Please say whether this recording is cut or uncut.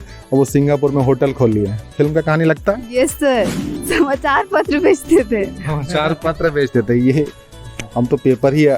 cut